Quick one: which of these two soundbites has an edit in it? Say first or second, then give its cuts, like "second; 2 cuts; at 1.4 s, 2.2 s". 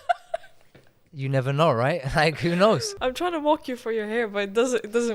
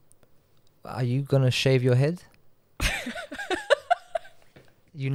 first; 1 cut; at 2.9 s